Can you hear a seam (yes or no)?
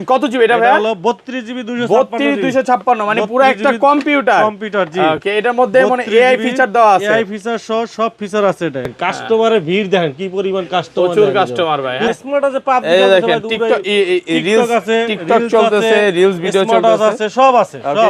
yes